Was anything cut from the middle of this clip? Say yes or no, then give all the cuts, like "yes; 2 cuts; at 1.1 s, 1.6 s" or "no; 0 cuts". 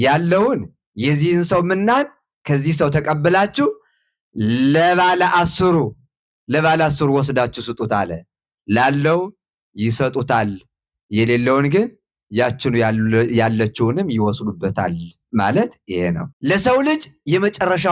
yes; 1 cut; at 16.3 s